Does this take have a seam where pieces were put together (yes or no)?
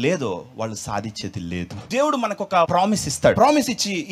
yes